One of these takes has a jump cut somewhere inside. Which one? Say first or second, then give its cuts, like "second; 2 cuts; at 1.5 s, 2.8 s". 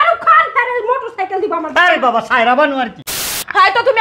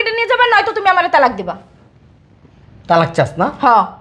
first; 1 cut; at 3.0 s